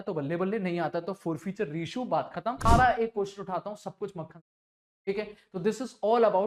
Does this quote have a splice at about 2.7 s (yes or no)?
yes